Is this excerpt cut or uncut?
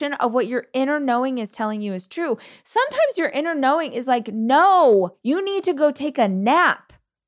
cut